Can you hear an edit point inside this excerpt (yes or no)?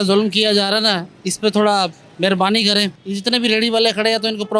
yes